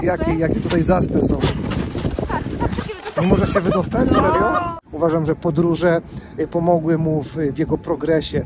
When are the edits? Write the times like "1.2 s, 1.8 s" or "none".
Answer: 4.7 s